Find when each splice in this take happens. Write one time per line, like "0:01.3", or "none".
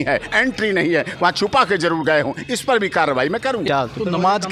0:03.6